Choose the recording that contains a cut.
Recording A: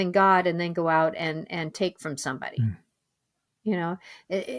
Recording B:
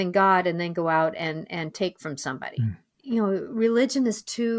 B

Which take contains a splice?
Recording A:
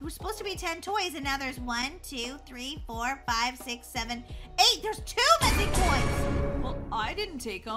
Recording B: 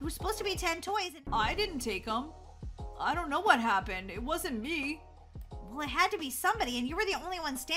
B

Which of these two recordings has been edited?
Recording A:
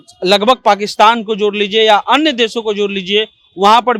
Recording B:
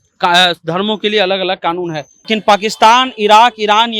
B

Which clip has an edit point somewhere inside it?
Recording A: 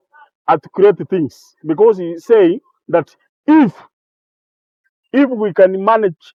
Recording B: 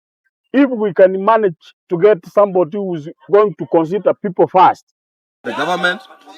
B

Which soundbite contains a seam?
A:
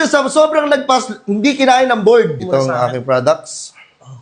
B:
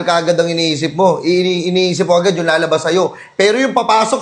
A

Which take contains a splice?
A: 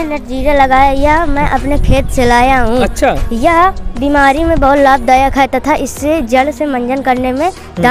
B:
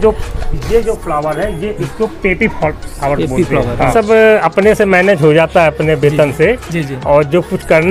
B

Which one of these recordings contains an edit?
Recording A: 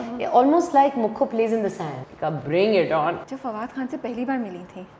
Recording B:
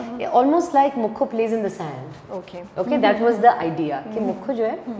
A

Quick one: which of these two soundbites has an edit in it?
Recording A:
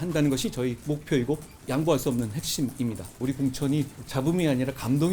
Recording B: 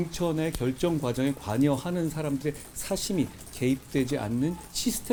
A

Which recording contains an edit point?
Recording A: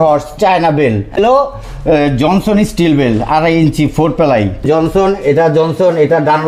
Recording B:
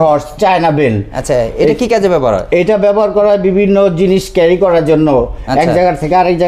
A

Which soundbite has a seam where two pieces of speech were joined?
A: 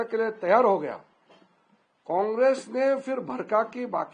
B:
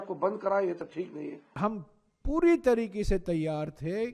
B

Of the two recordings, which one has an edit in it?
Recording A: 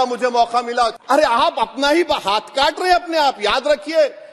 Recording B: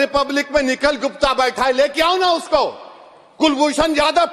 A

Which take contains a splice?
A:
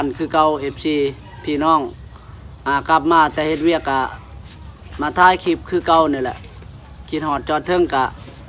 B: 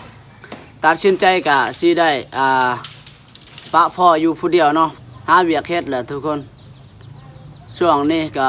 B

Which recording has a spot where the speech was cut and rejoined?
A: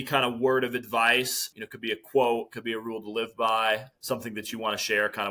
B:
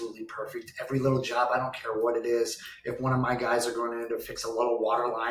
A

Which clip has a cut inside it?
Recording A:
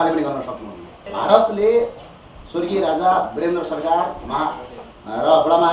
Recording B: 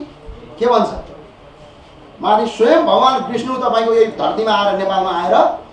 A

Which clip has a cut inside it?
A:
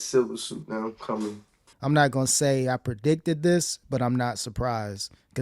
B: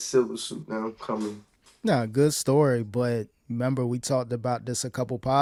A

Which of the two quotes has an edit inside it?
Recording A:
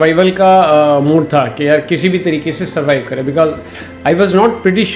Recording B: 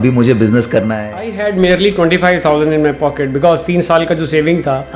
B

